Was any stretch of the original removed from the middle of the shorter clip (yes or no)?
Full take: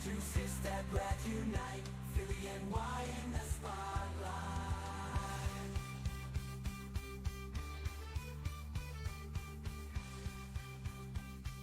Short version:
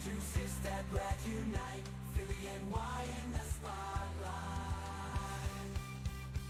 no